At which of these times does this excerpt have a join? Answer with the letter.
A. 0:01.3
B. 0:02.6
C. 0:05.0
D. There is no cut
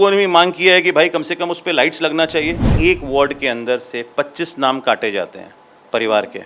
B